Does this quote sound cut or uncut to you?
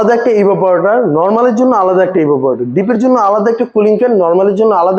uncut